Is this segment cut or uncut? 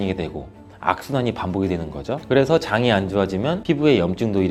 uncut